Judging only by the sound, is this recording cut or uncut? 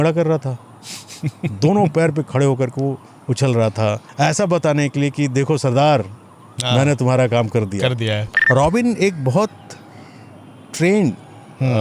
cut